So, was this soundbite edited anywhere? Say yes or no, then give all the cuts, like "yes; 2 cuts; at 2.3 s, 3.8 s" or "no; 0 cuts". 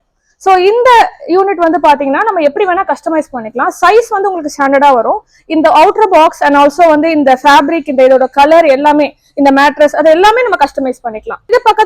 no; 0 cuts